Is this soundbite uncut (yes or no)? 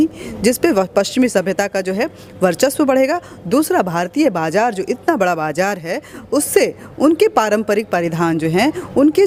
yes